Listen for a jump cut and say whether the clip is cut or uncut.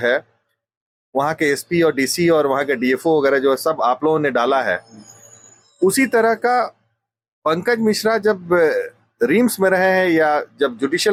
uncut